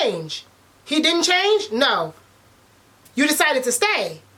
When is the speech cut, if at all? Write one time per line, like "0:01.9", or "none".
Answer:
none